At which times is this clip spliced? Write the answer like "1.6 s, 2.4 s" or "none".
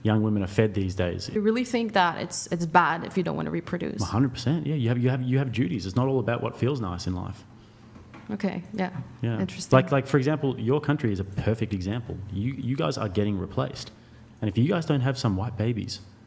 1.3 s